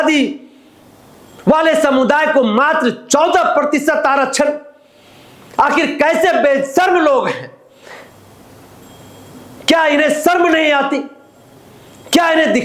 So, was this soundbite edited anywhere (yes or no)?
no